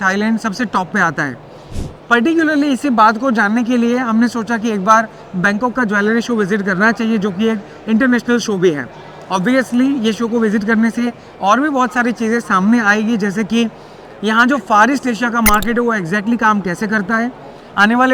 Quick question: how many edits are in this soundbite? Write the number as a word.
zero